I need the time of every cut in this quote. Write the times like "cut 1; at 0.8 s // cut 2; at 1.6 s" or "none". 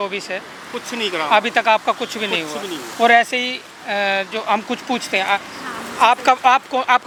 none

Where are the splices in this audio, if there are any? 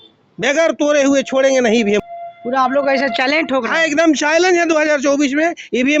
cut 1; at 2.0 s

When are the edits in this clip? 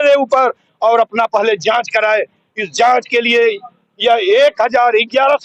none

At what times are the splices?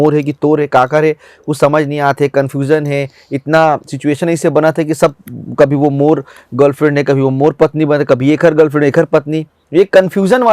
none

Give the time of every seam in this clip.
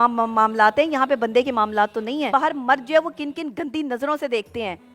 cut 1; at 2.3 s

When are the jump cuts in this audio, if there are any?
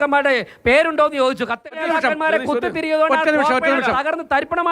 cut 1; at 1.6 s

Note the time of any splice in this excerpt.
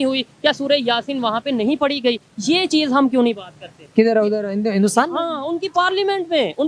none

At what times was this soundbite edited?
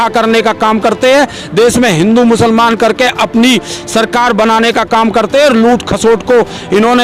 none

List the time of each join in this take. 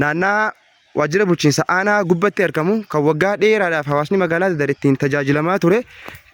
none

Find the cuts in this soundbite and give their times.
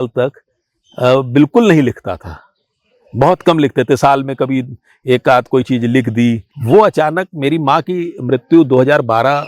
cut 1; at 6.5 s

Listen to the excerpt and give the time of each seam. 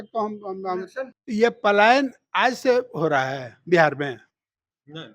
cut 1; at 1.2 s

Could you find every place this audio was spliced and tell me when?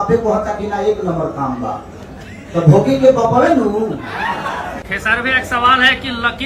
cut 1; at 4.9 s

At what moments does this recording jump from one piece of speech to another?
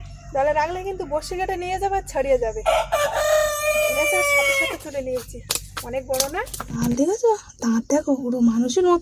cut 1; at 6.7 s

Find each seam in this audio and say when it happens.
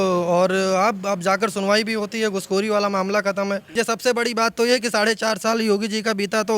cut 1; at 3.7 s

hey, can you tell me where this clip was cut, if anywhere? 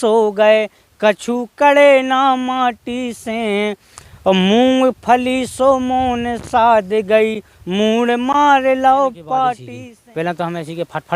cut 1; at 9.6 s

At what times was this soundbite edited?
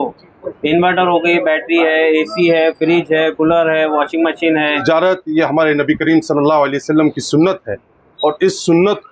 cut 1; at 4.8 s

